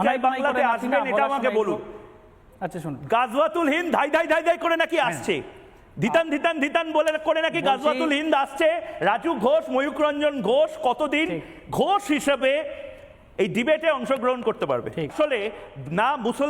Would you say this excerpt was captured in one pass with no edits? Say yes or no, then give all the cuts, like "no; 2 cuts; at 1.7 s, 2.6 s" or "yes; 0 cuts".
no; 1 cut; at 15.1 s